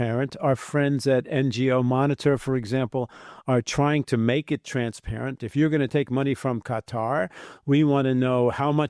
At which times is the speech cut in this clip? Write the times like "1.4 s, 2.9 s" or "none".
5.4 s